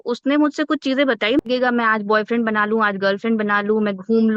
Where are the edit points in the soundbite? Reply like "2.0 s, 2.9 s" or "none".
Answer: 1.4 s

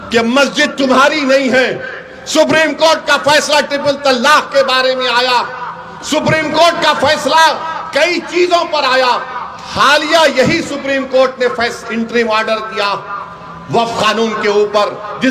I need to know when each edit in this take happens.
none

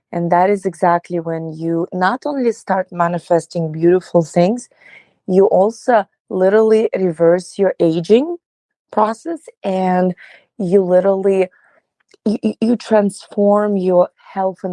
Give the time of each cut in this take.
none

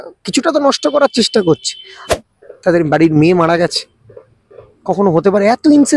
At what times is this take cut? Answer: 2.0 s

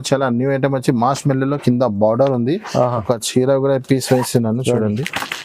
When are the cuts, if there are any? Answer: none

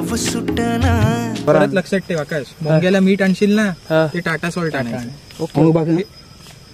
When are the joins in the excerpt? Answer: 1.5 s

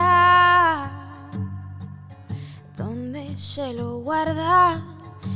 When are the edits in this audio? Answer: none

